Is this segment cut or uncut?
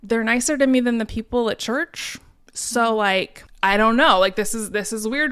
cut